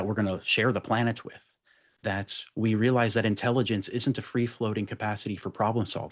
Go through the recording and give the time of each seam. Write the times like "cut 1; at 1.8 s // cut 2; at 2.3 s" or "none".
none